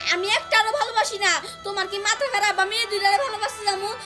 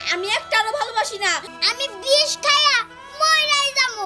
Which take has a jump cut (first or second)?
second